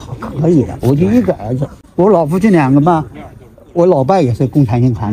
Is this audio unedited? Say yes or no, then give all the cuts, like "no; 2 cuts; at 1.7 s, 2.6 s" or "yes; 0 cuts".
yes; 0 cuts